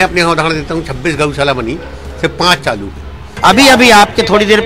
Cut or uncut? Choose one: cut